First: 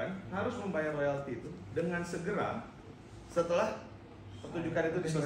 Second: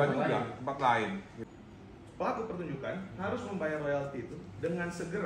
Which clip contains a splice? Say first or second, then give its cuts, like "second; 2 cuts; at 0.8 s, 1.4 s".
second; 1 cut; at 1.4 s